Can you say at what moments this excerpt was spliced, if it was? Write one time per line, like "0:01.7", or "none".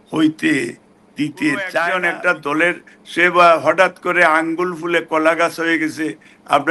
0:01.9